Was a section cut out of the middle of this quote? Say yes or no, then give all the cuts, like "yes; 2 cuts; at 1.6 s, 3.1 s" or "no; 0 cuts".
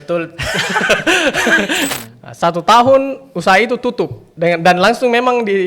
yes; 1 cut; at 1.9 s